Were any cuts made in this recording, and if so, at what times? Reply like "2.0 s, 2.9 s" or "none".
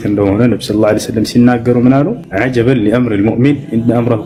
none